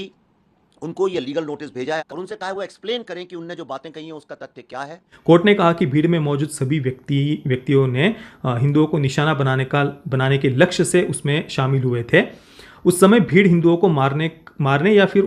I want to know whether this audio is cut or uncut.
cut